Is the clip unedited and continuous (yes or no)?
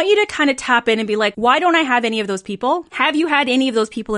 no